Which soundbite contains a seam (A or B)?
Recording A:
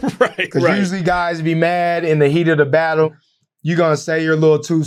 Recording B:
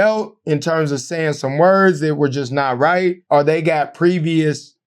B